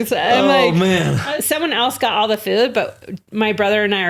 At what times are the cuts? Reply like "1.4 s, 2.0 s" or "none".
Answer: 1.2 s

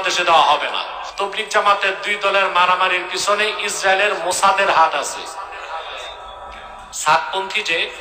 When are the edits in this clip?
1.0 s

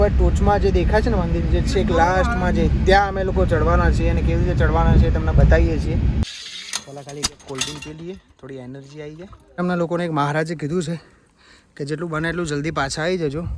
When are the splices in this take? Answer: 6.3 s, 9.6 s

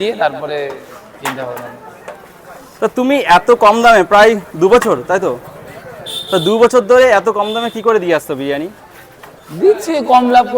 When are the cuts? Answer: none

